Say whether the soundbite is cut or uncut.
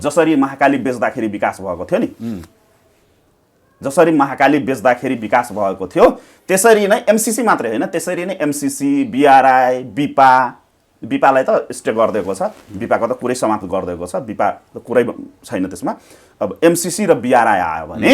uncut